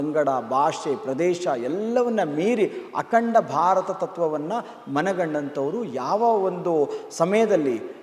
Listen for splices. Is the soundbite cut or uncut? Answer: uncut